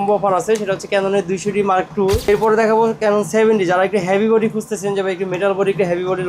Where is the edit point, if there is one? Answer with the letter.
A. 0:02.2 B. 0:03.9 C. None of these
A